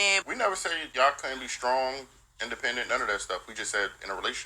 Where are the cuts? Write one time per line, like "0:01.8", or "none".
0:03.0